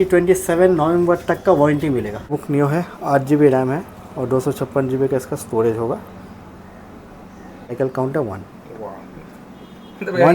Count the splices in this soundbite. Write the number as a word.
two